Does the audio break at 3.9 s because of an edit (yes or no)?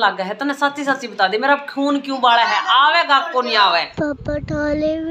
yes